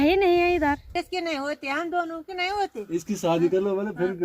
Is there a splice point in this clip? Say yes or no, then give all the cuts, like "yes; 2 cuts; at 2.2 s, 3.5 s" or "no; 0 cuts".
yes; 1 cut; at 0.9 s